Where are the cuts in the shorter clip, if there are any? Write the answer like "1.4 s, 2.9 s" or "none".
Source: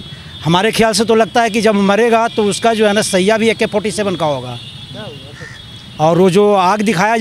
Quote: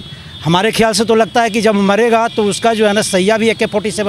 none